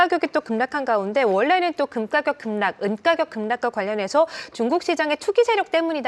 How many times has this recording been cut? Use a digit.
0